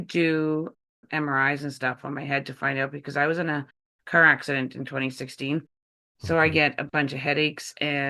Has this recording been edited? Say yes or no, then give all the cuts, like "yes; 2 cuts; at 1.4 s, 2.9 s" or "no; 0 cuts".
yes; 1 cut; at 0.9 s